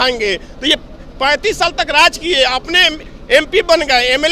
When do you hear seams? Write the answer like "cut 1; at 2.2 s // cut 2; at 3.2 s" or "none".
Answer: none

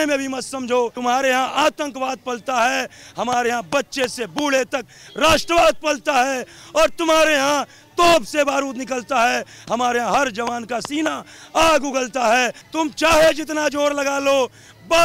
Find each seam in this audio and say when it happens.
cut 1; at 0.9 s // cut 2; at 12.6 s

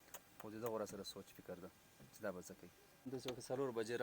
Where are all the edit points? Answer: cut 1; at 3.1 s

